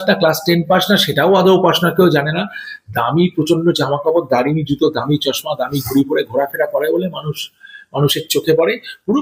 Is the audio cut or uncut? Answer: uncut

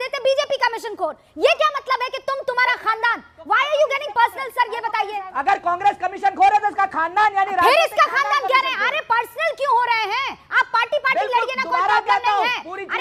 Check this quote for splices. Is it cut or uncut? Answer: uncut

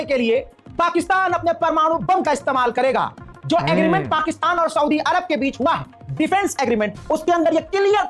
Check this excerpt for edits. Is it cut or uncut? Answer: uncut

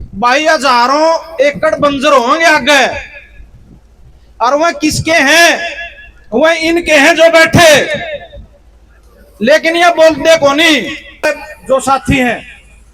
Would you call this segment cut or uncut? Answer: cut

